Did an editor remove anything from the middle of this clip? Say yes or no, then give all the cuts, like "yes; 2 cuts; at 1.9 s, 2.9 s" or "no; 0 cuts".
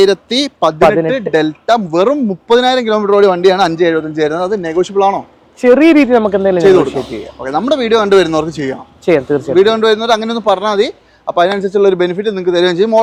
no; 0 cuts